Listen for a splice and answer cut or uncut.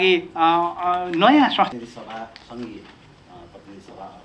cut